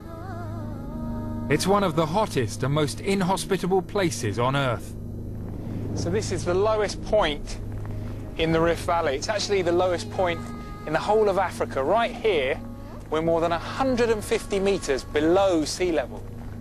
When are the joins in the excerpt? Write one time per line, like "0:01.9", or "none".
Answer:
0:09.8